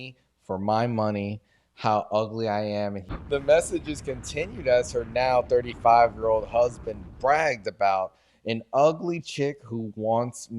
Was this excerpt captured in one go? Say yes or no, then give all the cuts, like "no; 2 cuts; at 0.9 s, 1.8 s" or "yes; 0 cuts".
no; 1 cut; at 3.1 s